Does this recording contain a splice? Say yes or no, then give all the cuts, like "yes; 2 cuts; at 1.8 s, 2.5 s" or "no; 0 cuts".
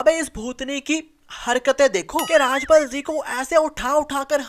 no; 0 cuts